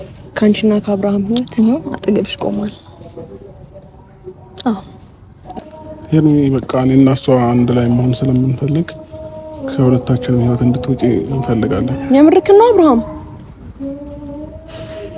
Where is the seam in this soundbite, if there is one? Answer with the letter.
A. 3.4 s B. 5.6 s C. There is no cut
B